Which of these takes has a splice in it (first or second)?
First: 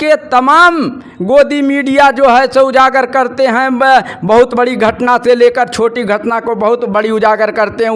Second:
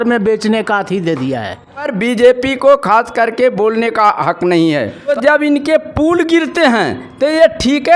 second